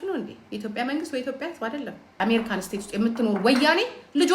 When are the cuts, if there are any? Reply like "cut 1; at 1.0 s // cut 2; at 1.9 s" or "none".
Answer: cut 1; at 2.1 s